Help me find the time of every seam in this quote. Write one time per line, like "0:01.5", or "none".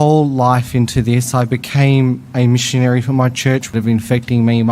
0:03.7

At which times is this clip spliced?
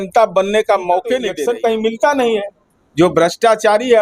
0:01.3

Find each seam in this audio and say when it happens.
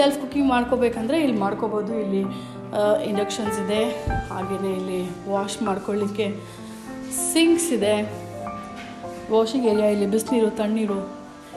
none

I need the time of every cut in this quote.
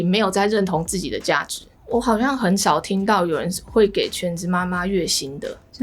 0:01.8

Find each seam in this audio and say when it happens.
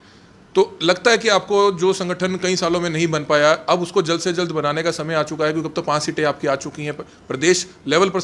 none

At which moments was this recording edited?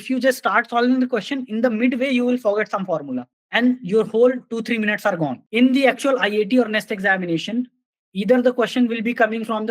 0:05.4

